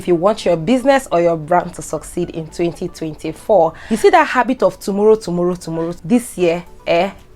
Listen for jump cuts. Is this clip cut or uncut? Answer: cut